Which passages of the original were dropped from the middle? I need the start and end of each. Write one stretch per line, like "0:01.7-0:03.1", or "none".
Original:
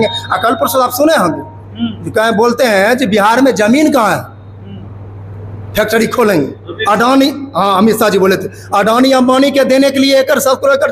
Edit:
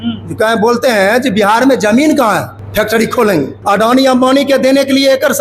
0:04.3-0:05.6
0:06.6-0:08.6